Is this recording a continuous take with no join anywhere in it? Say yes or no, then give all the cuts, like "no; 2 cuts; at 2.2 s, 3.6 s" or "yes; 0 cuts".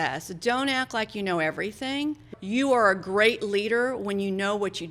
no; 1 cut; at 2.2 s